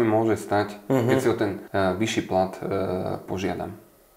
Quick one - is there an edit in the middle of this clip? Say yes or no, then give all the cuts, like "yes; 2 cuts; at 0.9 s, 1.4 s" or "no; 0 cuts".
yes; 1 cut; at 1.6 s